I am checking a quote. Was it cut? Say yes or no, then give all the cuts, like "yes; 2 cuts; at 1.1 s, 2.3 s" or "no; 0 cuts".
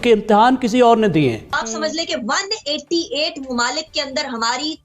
yes; 1 cut; at 1.6 s